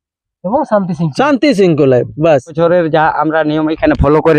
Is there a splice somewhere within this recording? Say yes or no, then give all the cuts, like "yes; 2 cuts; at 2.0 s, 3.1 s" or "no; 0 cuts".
yes; 1 cut; at 2.6 s